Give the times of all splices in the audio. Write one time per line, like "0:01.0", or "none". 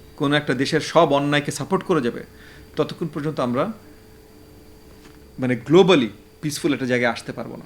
none